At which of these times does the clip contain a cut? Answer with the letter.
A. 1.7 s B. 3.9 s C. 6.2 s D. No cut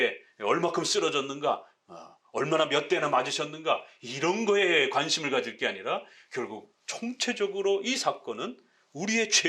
D